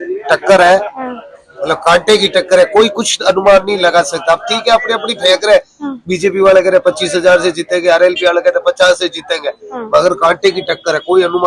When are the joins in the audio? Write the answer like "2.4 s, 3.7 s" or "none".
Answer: none